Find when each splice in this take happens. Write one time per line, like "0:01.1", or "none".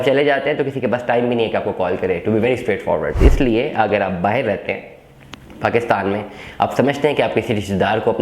0:03.2